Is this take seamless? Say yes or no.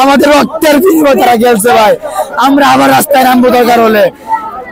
yes